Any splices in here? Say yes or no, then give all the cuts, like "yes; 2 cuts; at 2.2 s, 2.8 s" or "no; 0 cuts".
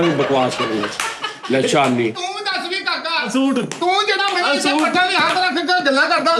yes; 1 cut; at 2.1 s